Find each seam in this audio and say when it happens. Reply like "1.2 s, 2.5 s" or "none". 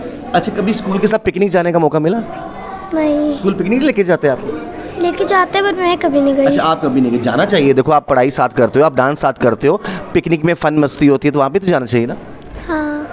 none